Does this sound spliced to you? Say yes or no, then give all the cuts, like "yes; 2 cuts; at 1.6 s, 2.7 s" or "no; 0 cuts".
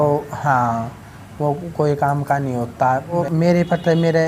yes; 1 cut; at 3.2 s